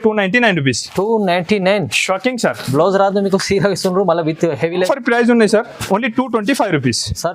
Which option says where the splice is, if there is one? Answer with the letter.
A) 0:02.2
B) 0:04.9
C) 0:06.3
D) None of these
B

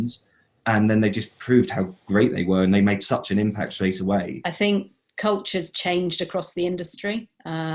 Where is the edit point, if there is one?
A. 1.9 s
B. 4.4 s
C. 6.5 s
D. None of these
B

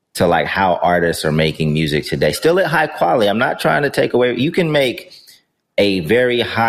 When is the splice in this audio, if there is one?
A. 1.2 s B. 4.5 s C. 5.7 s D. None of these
D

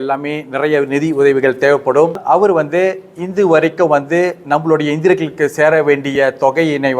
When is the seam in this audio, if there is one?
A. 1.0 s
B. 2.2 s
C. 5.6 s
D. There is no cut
B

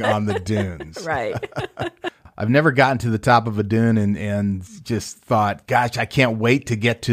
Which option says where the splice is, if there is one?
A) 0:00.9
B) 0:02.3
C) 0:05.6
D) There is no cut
B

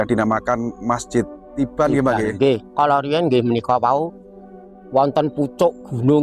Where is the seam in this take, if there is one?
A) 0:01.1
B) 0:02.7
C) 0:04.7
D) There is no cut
B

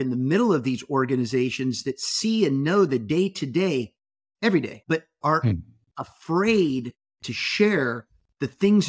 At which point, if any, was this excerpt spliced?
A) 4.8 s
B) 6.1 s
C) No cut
A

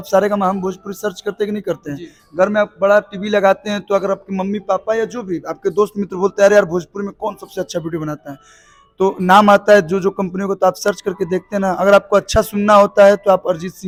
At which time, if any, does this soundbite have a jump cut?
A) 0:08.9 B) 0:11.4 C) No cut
C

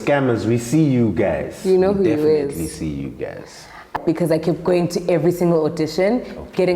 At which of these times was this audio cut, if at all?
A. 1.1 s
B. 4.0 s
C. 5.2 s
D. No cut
B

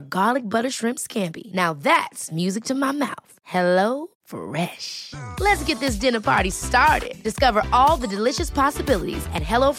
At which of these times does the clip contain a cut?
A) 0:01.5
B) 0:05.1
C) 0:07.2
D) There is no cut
D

